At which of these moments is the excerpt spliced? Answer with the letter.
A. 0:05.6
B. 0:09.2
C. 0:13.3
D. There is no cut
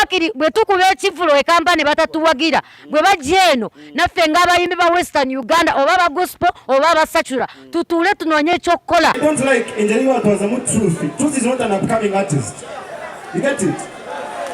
B